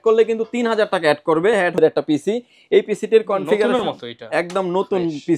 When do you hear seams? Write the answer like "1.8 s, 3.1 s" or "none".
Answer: 1.8 s

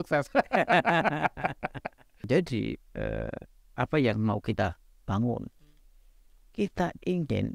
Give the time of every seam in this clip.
2.2 s

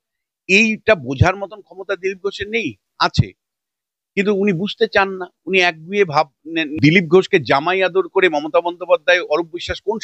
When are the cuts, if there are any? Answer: 6.7 s

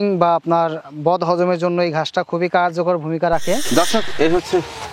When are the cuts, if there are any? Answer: 3.6 s

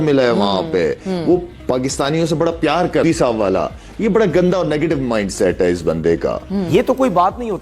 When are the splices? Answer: 3.0 s, 6.7 s

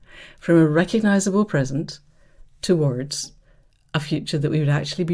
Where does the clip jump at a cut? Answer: none

